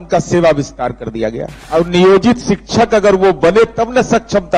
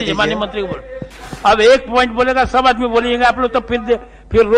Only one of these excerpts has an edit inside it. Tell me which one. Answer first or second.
first